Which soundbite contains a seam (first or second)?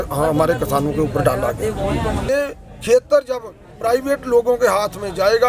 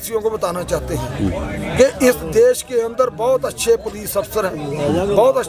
first